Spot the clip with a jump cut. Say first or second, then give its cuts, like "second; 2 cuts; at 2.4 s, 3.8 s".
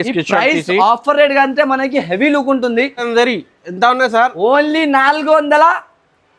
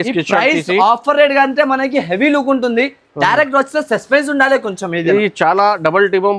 first; 1 cut; at 3.1 s